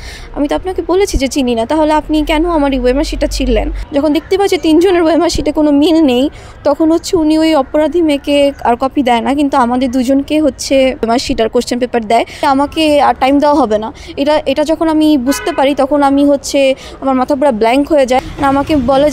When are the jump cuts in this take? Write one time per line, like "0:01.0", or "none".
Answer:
0:03.8
0:11.1
0:12.4
0:18.2